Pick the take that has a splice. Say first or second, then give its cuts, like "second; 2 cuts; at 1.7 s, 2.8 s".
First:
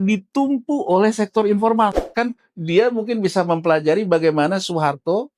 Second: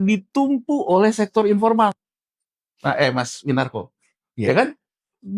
first; 1 cut; at 2.0 s